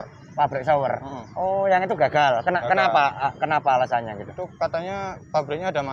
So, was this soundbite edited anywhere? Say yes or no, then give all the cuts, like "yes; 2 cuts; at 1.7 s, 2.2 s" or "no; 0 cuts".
no; 0 cuts